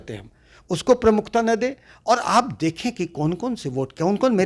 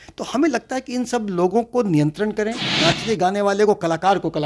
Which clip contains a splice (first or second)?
second